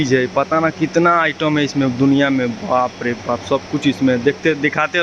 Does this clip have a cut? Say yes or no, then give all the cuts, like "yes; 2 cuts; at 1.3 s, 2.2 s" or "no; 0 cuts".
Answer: no; 0 cuts